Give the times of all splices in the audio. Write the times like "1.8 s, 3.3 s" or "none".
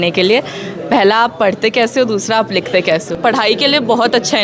3.1 s